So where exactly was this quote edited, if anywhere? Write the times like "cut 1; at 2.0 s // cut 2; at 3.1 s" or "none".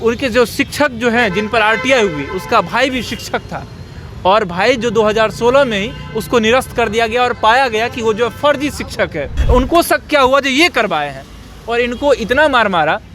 cut 1; at 9.3 s